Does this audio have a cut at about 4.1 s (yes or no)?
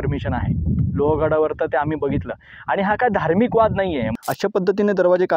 yes